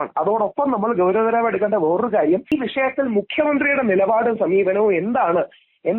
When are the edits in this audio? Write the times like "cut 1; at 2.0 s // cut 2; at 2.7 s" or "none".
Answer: cut 1; at 2.5 s